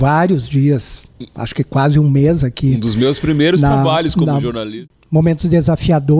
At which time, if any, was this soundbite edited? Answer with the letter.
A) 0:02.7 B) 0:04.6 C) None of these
B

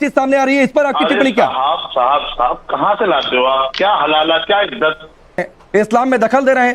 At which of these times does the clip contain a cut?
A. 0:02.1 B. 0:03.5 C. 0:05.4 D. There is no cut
C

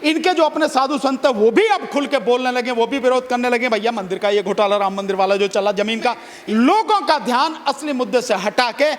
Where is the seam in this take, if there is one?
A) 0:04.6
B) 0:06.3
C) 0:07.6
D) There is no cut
B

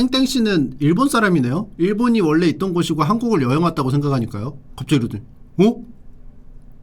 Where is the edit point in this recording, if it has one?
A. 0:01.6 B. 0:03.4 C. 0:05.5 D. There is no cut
A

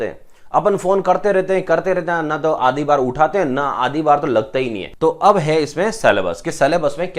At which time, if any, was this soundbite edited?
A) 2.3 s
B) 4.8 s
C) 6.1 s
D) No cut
B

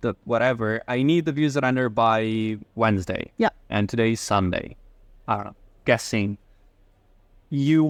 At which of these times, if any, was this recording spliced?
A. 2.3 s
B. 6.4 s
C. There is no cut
C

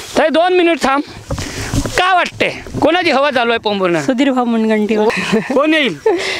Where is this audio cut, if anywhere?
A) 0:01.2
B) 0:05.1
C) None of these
B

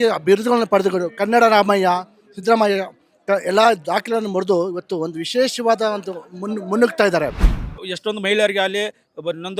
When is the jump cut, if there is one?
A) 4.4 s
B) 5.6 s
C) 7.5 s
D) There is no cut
C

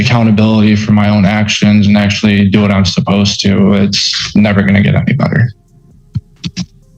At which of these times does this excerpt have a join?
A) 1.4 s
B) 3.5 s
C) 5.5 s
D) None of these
D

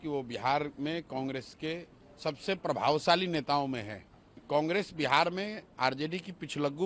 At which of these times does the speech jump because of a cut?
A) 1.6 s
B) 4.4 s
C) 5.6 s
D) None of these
B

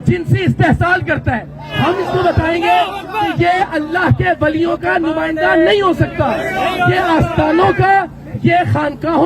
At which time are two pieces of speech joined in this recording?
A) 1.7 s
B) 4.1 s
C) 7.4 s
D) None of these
A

